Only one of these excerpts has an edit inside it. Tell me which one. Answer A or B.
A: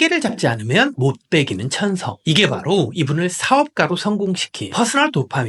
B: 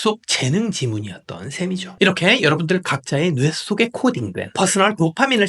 B